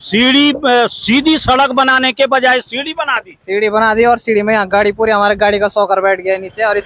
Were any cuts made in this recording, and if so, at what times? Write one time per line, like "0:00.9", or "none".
none

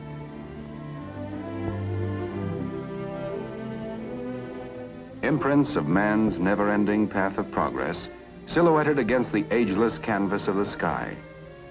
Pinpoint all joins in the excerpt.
0:02.4

